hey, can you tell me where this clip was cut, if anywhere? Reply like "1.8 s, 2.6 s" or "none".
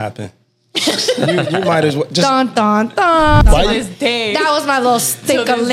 3.4 s